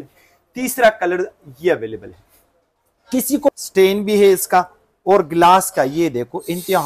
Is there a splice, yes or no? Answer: yes